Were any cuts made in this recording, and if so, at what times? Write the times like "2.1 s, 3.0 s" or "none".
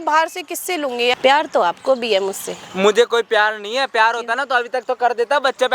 1.1 s